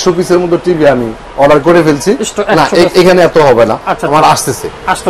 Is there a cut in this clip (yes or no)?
no